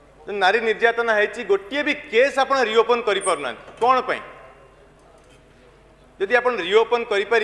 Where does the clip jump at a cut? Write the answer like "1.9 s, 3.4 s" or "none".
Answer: none